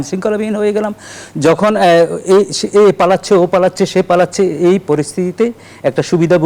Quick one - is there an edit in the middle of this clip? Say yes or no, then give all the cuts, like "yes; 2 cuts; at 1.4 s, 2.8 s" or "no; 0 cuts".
no; 0 cuts